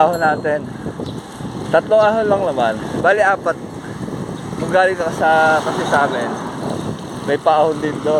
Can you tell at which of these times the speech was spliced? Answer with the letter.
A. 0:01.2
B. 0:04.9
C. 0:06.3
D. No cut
D